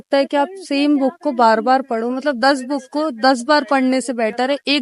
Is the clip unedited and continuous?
yes; 0 cuts

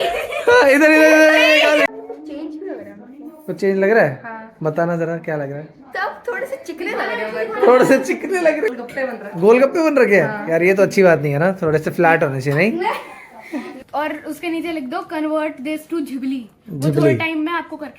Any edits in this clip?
yes; 3 cuts; at 1.9 s, 8.7 s, 13.7 s

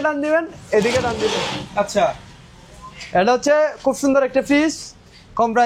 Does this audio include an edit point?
no; 0 cuts

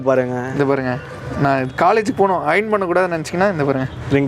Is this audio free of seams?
yes; 0 cuts

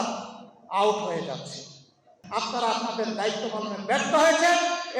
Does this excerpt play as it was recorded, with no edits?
no; 1 cut; at 2.2 s

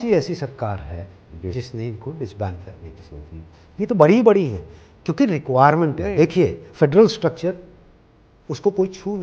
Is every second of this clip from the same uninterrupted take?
yes; 0 cuts

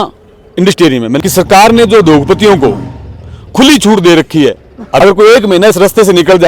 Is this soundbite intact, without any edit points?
no; 2 cuts; at 1.2 s, 4.8 s

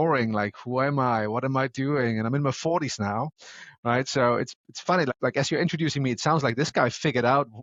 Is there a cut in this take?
no; 0 cuts

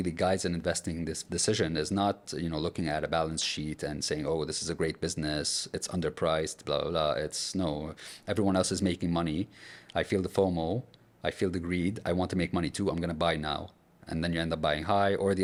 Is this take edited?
no; 0 cuts

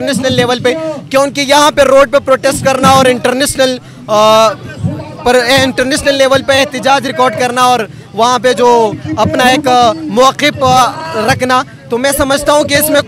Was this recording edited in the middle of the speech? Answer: no; 0 cuts

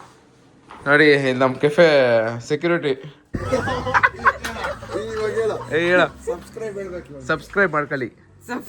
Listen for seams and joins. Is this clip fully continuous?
no; 1 cut; at 3.4 s

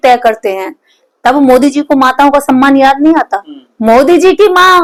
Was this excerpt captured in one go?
yes; 0 cuts

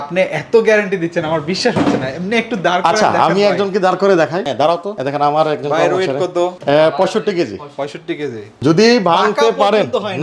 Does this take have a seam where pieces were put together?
no; 0 cuts

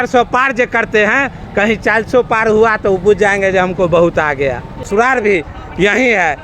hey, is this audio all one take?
no; 1 cut; at 4.9 s

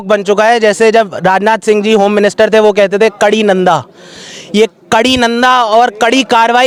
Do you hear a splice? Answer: no; 0 cuts

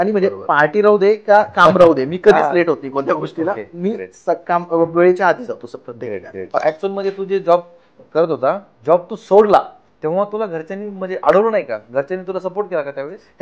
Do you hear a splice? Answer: yes; 1 cut; at 6.6 s

